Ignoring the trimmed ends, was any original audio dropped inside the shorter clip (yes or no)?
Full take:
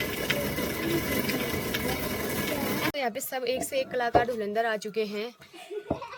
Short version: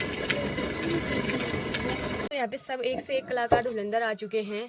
yes